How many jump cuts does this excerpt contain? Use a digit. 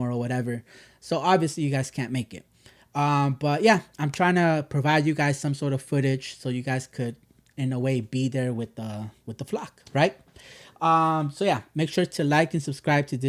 0